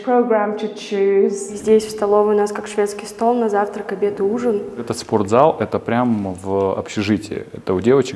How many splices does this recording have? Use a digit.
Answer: 2